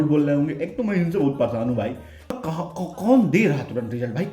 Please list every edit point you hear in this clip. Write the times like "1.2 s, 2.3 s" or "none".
2.3 s